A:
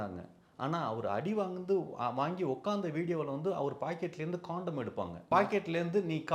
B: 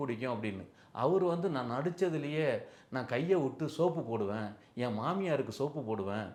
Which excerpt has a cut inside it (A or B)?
A